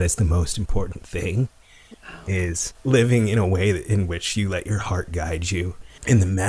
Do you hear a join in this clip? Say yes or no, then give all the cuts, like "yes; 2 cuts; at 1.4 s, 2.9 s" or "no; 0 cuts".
yes; 1 cut; at 2.7 s